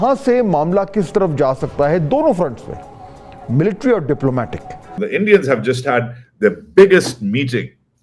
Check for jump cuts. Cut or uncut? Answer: cut